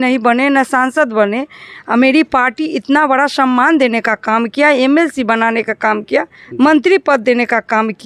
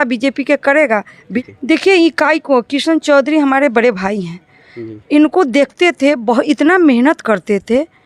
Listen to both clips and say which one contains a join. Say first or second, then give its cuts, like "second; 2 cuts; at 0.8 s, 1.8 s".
second; 1 cut; at 1.3 s